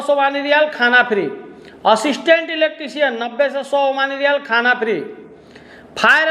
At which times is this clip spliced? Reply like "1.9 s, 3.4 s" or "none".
none